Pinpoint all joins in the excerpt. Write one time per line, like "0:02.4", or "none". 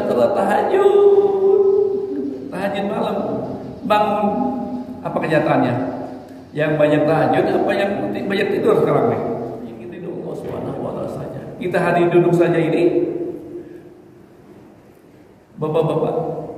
0:10.0